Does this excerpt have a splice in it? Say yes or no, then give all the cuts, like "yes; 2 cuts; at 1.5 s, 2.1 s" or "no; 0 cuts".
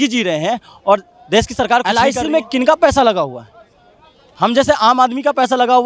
yes; 1 cut; at 1.8 s